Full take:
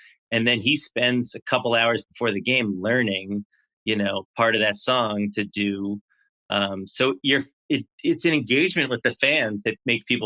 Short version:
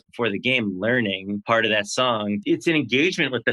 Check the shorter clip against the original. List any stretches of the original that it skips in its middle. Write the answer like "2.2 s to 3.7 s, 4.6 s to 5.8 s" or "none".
3.4 s to 4.3 s, 5.3 s to 8.0 s